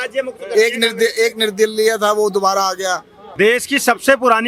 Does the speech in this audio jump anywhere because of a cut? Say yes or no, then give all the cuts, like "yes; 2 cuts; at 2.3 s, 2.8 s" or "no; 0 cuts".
yes; 1 cut; at 3.2 s